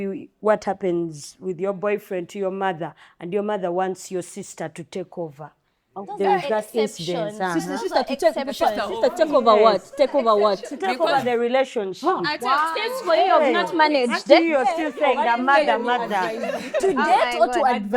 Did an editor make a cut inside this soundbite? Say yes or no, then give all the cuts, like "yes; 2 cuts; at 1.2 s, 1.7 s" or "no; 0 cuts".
no; 0 cuts